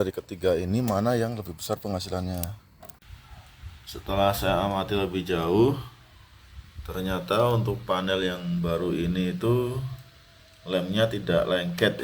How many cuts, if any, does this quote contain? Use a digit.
1